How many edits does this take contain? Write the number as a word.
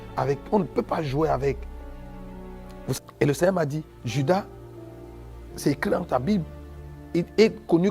one